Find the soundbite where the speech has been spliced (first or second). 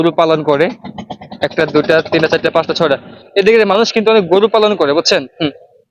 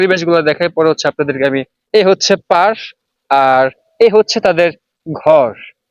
second